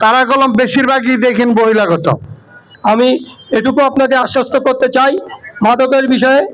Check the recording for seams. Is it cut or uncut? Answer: cut